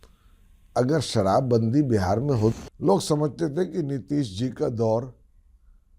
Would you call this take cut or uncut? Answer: cut